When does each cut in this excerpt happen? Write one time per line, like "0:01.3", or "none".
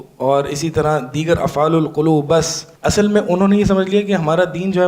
0:02.6